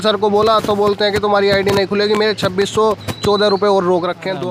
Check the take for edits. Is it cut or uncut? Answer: uncut